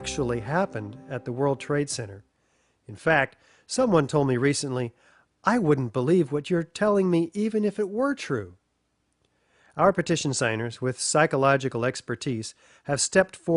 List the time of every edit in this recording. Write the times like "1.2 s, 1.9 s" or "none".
1.4 s

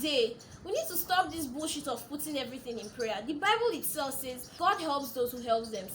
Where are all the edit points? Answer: 4.5 s

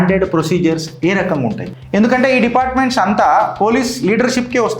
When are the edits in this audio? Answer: 1.7 s

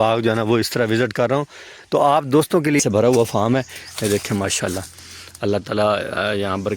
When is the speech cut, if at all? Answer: 2.8 s

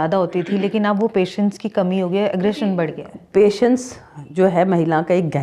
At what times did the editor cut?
none

